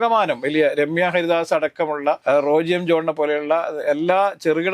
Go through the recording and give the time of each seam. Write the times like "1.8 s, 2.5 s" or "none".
2.2 s